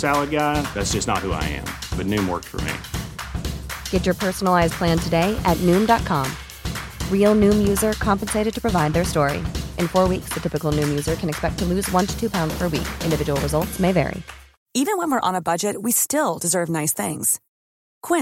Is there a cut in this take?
yes; 1 cut; at 14.6 s

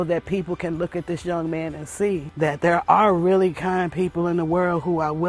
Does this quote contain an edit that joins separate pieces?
yes; 1 cut; at 2.3 s

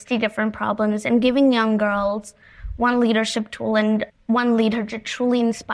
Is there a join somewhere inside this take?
no; 0 cuts

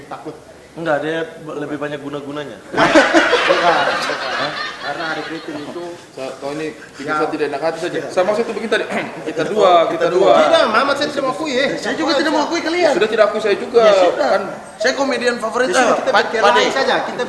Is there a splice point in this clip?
no; 0 cuts

